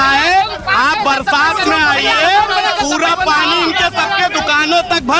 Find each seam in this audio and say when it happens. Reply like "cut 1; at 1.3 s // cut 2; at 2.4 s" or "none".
none